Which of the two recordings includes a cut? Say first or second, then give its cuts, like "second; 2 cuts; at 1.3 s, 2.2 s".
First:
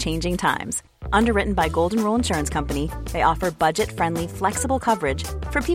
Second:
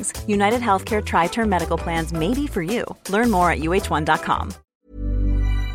second; 1 cut; at 4.6 s